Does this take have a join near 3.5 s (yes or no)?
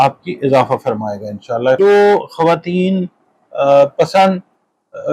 no